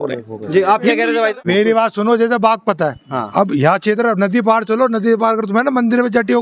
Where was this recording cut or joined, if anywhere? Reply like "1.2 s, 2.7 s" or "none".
1.4 s